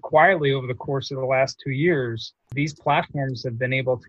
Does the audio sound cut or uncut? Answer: cut